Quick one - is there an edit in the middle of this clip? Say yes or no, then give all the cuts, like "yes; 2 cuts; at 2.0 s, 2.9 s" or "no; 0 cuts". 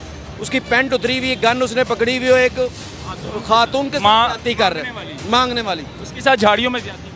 no; 0 cuts